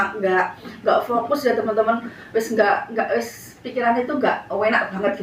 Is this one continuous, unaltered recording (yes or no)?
yes